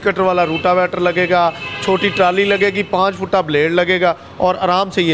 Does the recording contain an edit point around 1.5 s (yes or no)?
no